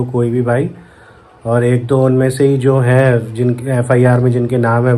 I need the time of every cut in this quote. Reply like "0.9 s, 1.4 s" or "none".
none